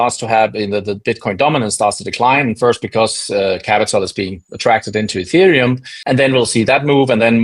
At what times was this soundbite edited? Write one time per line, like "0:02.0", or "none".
0:05.9